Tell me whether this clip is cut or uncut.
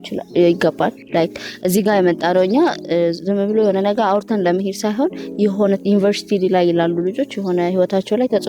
cut